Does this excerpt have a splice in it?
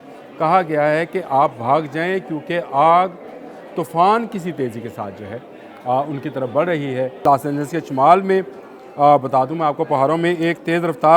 yes; 1 cut; at 7.2 s

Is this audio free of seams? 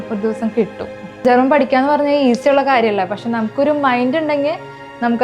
no; 1 cut; at 1.2 s

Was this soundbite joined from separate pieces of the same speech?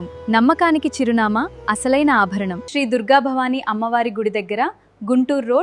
yes; 1 cut; at 2.6 s

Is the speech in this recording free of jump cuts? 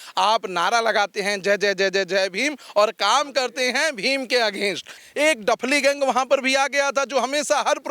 no; 1 cut; at 5.0 s

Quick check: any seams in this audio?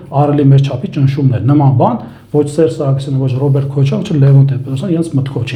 no; 0 cuts

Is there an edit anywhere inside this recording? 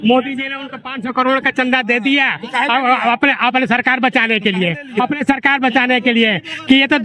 no; 0 cuts

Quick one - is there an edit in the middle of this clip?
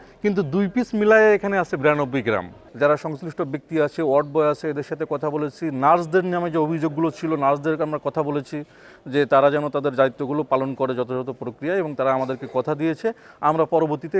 yes; 1 cut; at 2.6 s

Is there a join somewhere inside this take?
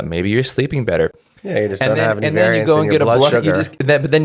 no; 0 cuts

